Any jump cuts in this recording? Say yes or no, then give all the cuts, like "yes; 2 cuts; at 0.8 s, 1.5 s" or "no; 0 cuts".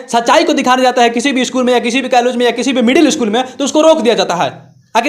no; 0 cuts